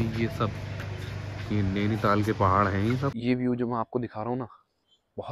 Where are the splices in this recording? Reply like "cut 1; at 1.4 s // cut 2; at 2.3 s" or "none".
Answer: cut 1; at 3.2 s